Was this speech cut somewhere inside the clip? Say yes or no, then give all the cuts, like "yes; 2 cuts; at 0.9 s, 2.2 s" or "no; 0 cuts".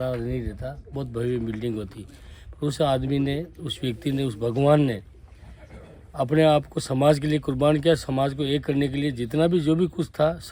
no; 0 cuts